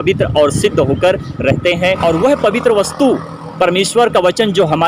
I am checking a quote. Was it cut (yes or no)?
yes